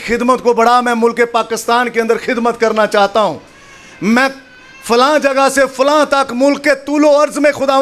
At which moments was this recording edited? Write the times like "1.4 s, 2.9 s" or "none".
none